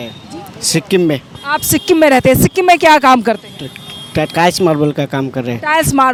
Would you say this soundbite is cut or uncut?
uncut